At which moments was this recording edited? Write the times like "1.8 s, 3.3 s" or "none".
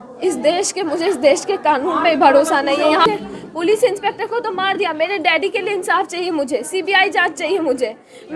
3.0 s